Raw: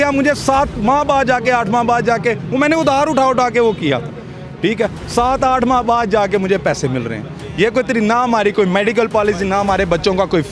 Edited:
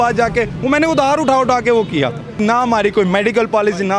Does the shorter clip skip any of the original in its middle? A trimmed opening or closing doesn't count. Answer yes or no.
yes